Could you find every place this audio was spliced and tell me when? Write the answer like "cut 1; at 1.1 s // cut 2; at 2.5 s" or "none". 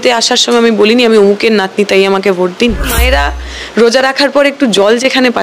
cut 1; at 3.0 s